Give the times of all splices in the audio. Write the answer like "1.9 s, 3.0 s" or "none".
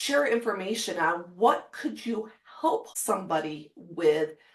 2.9 s